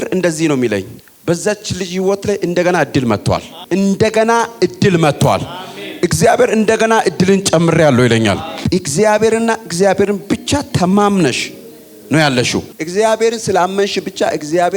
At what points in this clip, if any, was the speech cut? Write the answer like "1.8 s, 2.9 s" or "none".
3.5 s, 8.6 s

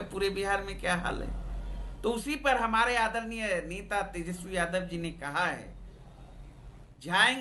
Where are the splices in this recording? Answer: none

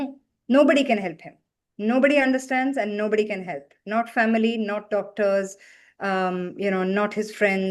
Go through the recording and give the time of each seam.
none

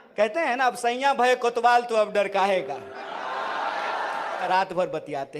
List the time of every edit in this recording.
4.4 s

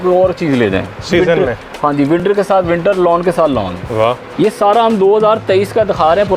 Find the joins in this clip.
4.2 s

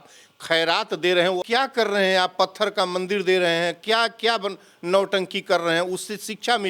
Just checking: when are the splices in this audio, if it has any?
1.4 s

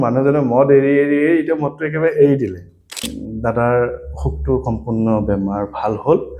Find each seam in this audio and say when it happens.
3.0 s

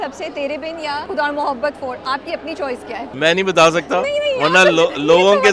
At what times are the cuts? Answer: 1.0 s, 3.1 s

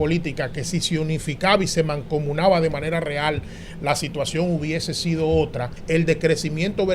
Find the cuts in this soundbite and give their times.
5.8 s

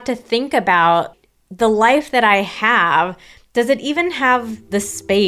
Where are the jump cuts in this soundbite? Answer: 1.1 s

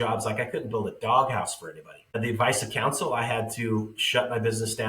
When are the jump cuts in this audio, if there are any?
2.1 s

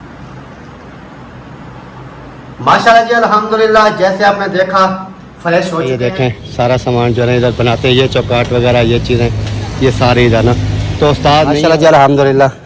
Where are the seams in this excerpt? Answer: 5.9 s, 11.6 s

